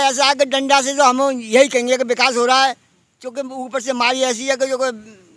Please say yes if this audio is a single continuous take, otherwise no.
yes